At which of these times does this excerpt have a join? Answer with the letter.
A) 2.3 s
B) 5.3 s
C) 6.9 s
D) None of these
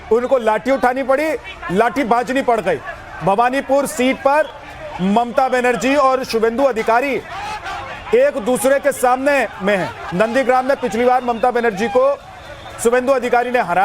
B